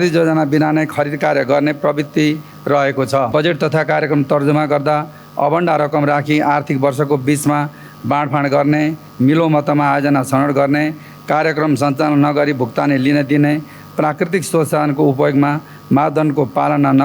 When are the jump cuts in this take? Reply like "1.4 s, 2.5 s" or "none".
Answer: 3.3 s